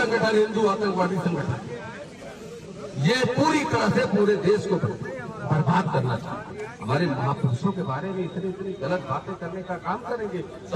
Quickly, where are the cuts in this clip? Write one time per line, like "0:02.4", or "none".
none

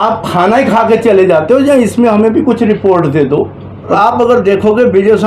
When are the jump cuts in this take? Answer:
0:04.0

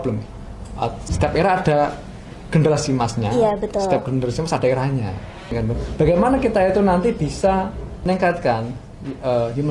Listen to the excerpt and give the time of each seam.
0:01.0
0:05.5
0:08.0

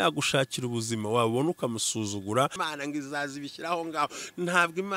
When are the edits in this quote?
0:02.6

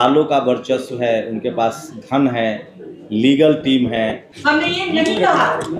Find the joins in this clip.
0:04.3

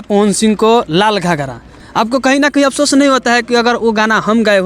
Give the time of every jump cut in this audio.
0:01.8

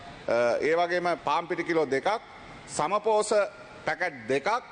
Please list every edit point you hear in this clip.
0:01.2

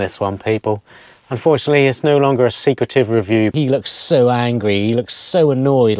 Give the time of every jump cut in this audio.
0:03.5

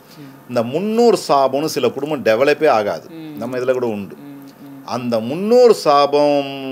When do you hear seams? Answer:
none

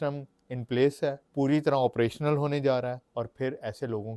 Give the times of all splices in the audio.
0:01.2
0:03.0

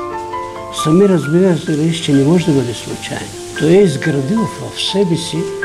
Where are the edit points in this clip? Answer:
0:03.4

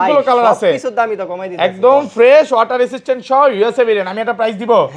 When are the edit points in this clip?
none

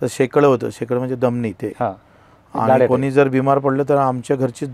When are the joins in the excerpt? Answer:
none

